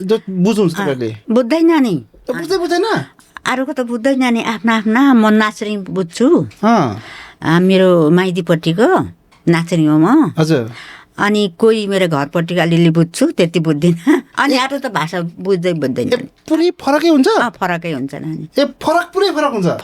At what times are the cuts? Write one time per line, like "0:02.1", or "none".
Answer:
0:01.1
0:14.3
0:18.4